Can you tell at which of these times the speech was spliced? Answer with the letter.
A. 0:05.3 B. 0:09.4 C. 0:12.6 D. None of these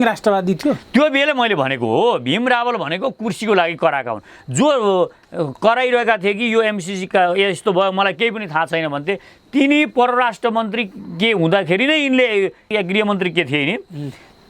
C